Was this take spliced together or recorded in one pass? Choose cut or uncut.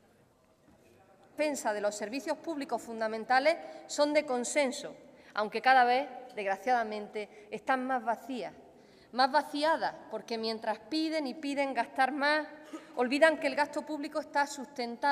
uncut